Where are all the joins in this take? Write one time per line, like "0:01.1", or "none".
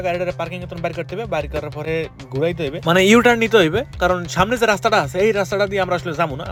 none